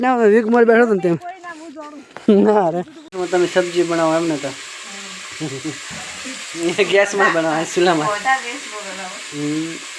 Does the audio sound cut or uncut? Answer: cut